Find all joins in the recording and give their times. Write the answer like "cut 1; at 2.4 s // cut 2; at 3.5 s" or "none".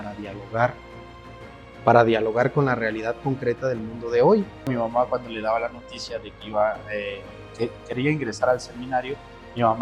cut 1; at 4.7 s